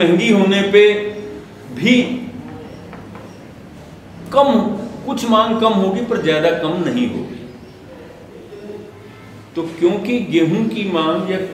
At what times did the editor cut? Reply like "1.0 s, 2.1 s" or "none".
none